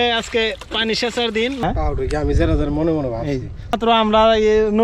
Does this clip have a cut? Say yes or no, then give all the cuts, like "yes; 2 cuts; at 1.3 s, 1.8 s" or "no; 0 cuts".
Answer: yes; 2 cuts; at 1.6 s, 3.8 s